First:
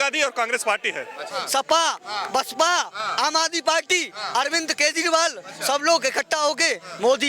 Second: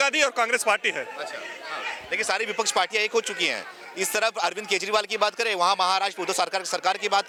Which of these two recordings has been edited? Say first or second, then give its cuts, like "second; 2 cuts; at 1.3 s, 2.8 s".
first; 1 cut; at 1.3 s